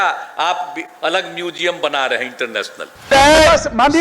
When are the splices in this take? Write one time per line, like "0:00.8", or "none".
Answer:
0:03.1

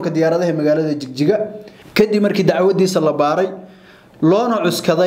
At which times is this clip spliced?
0:01.8

